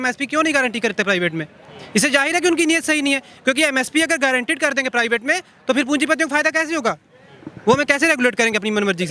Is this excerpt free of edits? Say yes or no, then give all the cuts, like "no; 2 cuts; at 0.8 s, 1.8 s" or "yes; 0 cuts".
yes; 0 cuts